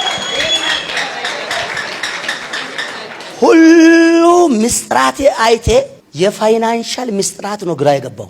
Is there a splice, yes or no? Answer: yes